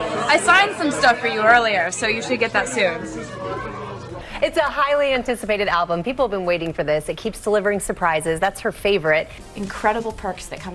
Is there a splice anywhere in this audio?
yes; 2 cuts; at 4.3 s, 9.3 s

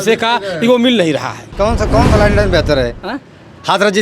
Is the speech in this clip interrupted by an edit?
yes; 1 cut; at 1.5 s

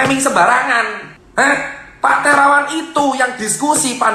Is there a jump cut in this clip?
no; 0 cuts

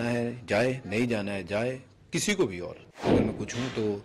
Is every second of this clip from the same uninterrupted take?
no; 1 cut; at 3.1 s

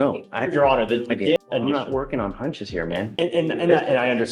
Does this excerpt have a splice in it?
yes; 1 cut; at 1.4 s

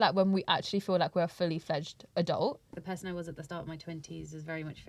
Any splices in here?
yes; 1 cut; at 2.7 s

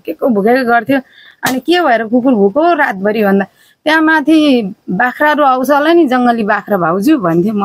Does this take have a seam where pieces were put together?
no; 0 cuts

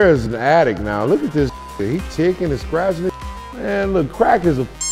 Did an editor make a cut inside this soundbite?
no; 0 cuts

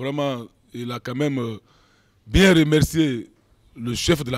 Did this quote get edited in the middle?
no; 0 cuts

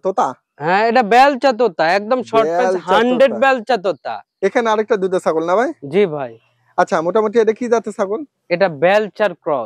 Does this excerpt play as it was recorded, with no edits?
no; 1 cut; at 4.2 s

